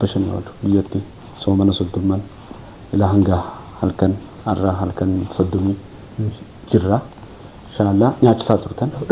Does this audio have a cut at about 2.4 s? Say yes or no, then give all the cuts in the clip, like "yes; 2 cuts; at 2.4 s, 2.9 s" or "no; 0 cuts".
no; 0 cuts